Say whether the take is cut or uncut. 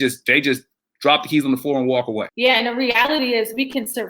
cut